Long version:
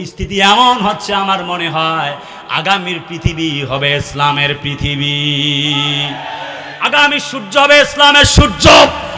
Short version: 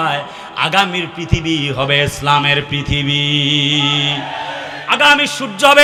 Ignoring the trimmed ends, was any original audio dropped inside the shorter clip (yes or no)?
no